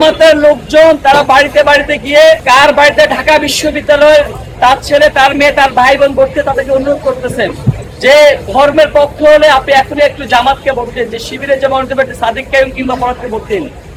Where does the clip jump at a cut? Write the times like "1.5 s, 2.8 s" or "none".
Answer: none